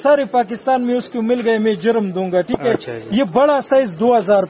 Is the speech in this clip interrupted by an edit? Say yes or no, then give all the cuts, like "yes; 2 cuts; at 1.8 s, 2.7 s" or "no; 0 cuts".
no; 0 cuts